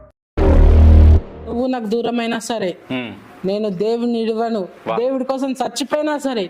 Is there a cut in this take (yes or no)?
yes